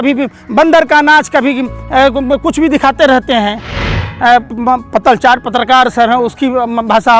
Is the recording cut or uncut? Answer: cut